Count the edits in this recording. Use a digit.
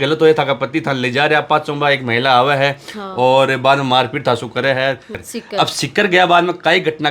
1